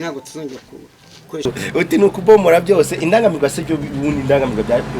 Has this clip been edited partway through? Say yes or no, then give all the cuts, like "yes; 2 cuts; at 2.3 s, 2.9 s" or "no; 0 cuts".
yes; 1 cut; at 1.4 s